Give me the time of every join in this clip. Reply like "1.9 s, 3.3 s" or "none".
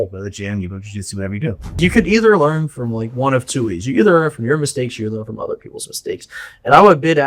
1.8 s

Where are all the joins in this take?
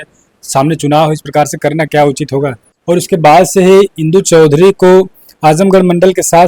2.7 s

